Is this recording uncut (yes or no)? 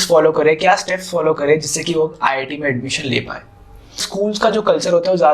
no